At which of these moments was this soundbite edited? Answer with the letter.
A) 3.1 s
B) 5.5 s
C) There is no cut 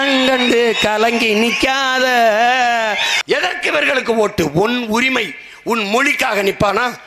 A